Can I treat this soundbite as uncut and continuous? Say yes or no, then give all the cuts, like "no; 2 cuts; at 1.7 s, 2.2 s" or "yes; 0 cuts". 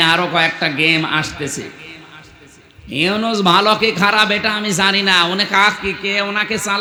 yes; 0 cuts